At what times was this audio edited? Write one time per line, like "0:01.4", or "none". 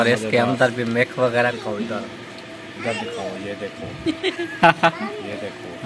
0:01.3